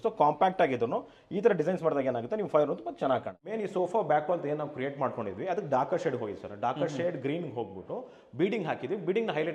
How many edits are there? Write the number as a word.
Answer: one